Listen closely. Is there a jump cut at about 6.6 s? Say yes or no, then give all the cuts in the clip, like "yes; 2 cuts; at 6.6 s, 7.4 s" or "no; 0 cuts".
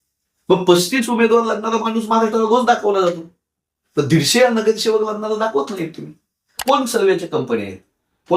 yes; 1 cut; at 6.6 s